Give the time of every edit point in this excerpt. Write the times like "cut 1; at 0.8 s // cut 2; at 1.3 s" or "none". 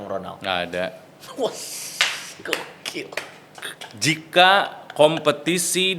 none

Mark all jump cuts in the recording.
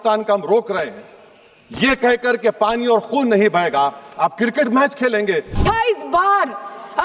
cut 1; at 5.5 s

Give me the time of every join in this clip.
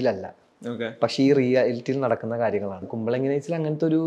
cut 1; at 2.9 s

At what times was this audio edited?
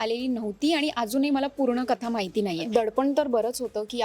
cut 1; at 2.7 s

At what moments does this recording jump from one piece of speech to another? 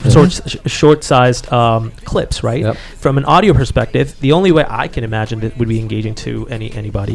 none

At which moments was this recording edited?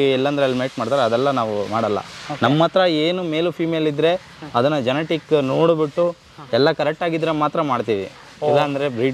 none

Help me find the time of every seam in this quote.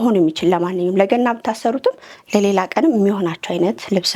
none

